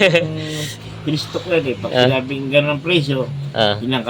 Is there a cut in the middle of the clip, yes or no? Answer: no